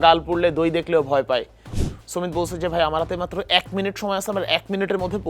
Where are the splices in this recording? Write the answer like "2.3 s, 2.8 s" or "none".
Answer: 1.8 s

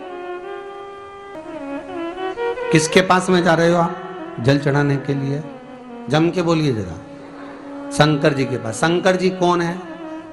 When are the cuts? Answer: 1.4 s

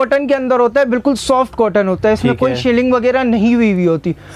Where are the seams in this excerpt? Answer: none

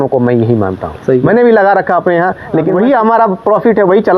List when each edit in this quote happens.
2.7 s

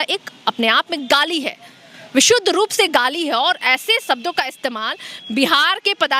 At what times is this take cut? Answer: none

